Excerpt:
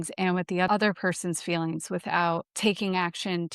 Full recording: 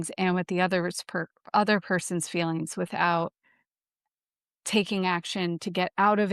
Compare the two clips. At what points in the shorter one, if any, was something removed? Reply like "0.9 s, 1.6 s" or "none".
0.7 s, 2.5 s